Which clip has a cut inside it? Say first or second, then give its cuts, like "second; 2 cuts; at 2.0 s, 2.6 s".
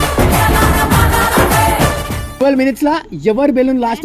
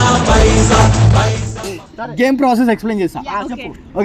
first; 1 cut; at 2.2 s